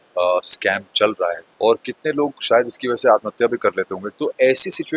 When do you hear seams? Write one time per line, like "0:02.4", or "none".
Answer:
0:01.5
0:04.0